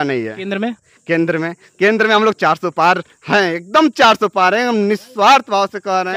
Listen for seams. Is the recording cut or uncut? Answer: uncut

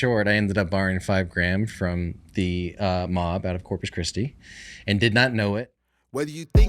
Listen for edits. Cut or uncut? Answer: cut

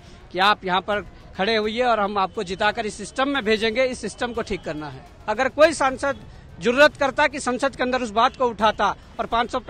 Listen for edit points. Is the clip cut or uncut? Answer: cut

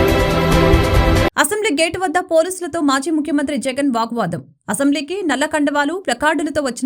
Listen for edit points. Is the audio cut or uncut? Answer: cut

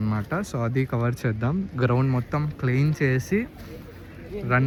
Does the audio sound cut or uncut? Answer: uncut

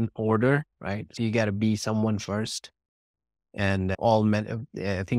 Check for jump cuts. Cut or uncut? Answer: cut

